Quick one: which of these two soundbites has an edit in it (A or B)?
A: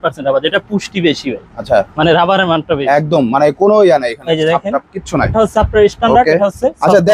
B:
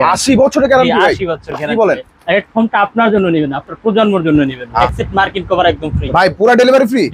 B